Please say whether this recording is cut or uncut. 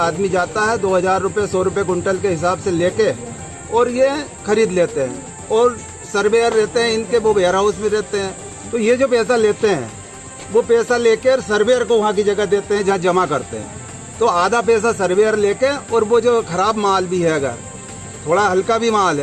uncut